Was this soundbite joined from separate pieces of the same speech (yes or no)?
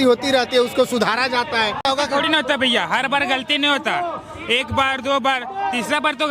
yes